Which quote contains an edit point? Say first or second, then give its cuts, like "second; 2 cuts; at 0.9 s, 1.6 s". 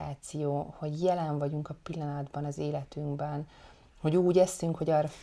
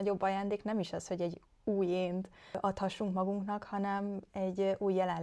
second; 1 cut; at 2.6 s